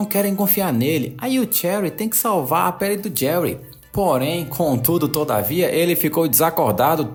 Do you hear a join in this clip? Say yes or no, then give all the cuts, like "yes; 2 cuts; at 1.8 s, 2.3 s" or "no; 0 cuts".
no; 0 cuts